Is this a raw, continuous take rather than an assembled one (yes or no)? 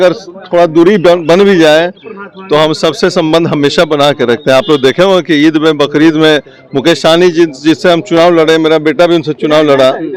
yes